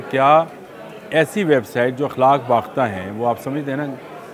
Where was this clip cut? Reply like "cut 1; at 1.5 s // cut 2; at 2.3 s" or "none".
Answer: none